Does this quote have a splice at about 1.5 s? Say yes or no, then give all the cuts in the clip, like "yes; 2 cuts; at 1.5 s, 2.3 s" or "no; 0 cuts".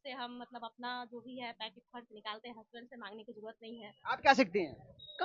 no; 1 cut; at 3.9 s